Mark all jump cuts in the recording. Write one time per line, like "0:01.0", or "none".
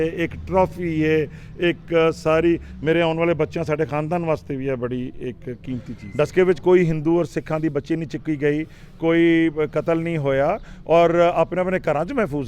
0:06.0